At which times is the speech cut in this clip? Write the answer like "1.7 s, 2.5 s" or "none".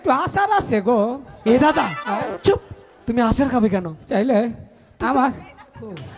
none